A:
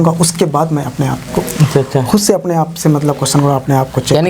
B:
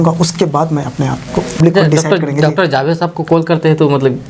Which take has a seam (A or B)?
B